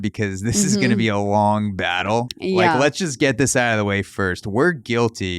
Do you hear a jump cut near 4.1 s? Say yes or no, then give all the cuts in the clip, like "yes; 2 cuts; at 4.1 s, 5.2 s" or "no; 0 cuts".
no; 1 cut; at 2.3 s